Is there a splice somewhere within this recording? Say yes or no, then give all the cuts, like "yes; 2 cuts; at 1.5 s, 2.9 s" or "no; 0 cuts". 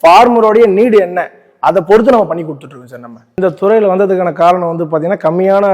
yes; 1 cut; at 3.3 s